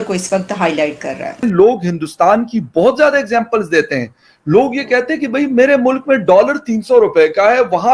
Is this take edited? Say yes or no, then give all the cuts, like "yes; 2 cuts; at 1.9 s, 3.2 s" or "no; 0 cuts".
yes; 1 cut; at 1.4 s